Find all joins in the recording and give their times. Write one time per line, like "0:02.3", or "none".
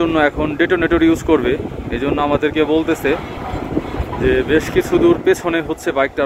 none